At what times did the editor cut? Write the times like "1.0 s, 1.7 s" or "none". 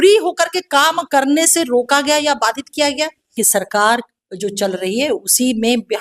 3.3 s